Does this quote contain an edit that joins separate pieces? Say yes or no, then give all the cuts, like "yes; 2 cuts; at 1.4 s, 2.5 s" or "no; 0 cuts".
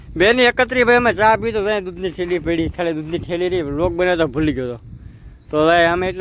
no; 0 cuts